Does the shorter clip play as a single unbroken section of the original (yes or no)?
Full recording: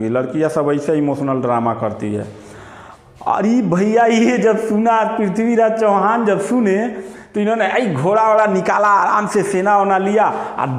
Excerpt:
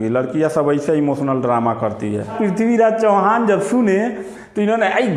no